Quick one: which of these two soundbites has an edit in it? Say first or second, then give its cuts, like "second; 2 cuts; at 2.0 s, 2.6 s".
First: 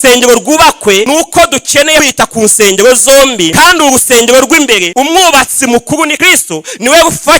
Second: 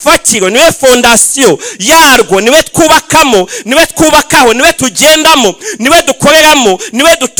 first; 5 cuts; at 1.1 s, 2.1 s, 3.5 s, 4.9 s, 6.2 s